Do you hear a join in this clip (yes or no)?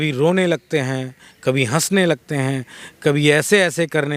no